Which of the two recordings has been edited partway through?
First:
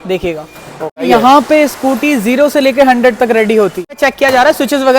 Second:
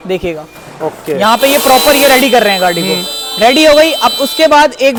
first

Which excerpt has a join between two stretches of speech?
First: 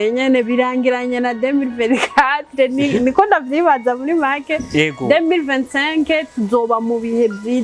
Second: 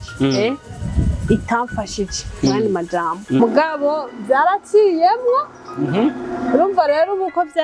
second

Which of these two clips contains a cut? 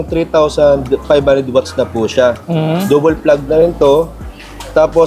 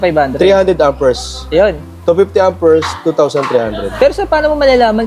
second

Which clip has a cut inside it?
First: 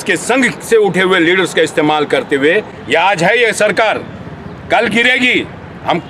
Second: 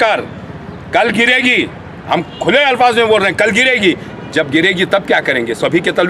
first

